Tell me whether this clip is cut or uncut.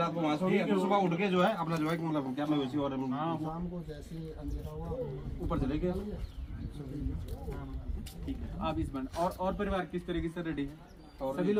uncut